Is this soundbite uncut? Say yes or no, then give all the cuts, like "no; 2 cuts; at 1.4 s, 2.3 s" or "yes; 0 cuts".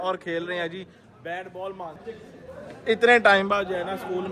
no; 1 cut; at 2.1 s